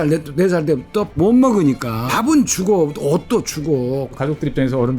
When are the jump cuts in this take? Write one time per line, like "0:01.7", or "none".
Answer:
0:01.2
0:02.1
0:04.1